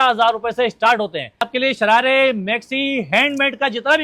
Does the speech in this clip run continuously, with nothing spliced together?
no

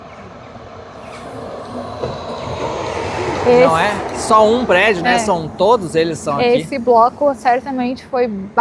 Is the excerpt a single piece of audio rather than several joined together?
yes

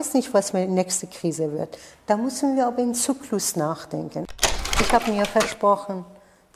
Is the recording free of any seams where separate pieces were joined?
no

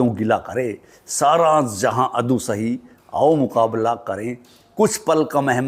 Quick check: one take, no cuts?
yes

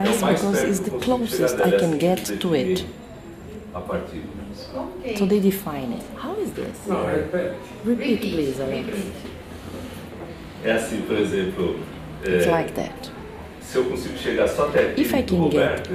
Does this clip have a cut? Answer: no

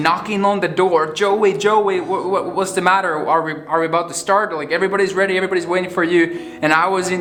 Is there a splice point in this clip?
no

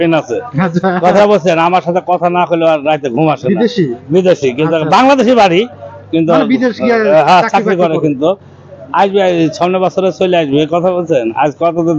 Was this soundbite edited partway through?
no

